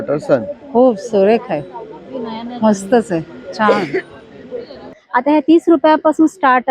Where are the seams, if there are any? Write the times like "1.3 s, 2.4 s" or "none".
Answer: 5.0 s